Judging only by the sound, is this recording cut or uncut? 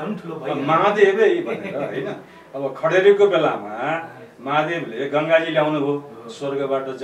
uncut